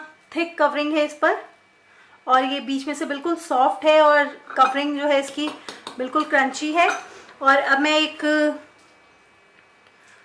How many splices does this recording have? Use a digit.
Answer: 0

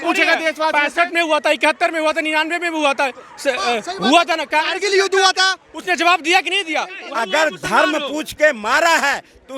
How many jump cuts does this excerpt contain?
1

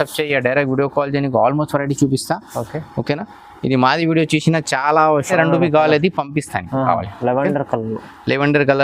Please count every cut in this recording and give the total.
1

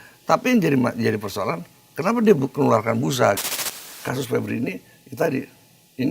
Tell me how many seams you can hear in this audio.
1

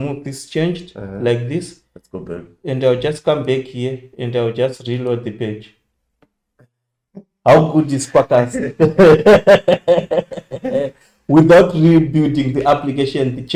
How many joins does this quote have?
0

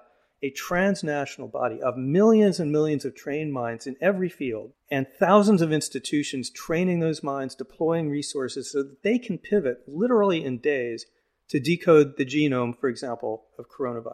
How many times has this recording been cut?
1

